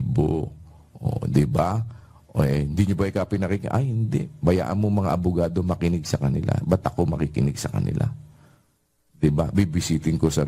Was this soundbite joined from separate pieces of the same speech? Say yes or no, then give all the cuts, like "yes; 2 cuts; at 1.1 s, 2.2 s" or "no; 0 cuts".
no; 0 cuts